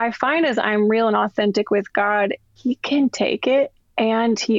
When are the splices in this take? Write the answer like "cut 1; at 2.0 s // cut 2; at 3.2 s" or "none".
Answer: none